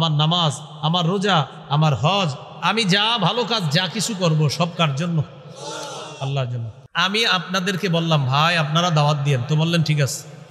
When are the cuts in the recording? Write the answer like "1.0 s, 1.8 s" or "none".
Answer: 6.9 s